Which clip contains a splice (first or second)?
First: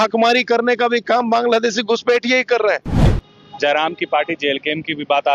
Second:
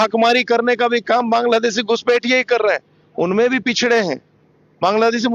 first